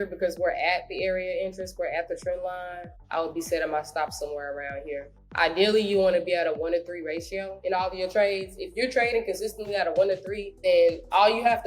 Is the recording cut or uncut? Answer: cut